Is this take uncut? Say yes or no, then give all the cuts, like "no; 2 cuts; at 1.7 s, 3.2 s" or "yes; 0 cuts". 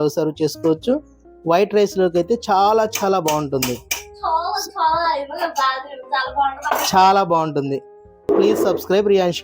no; 1 cut; at 8.3 s